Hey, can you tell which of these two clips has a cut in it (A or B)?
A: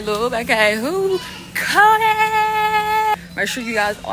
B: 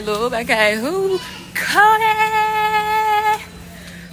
A